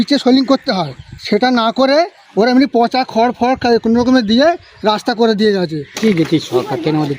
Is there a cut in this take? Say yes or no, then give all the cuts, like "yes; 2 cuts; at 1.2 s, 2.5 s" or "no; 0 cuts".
yes; 1 cut; at 6.0 s